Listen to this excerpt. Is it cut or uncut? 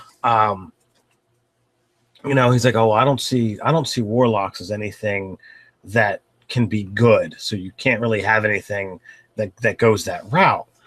uncut